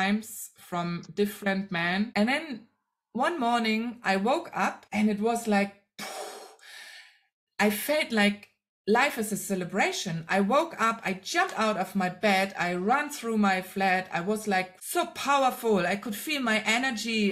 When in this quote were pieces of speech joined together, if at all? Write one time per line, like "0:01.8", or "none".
0:02.1